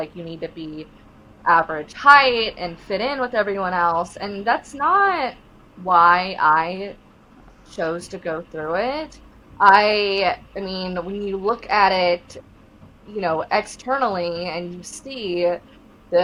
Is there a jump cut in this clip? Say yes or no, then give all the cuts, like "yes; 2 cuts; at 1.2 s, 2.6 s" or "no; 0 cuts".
no; 0 cuts